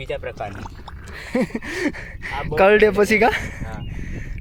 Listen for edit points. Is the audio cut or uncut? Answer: uncut